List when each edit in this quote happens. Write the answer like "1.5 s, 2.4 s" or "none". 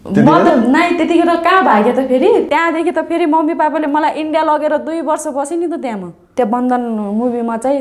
6.3 s